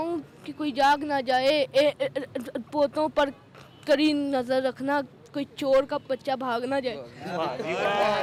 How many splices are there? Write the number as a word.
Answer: zero